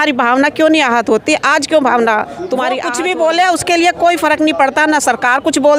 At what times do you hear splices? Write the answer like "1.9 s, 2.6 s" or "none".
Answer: 2.8 s